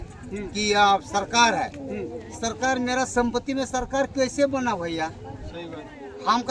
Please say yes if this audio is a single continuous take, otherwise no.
yes